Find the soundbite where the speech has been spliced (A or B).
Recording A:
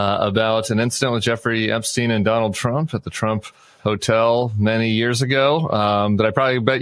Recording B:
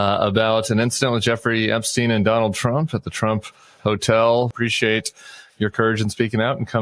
B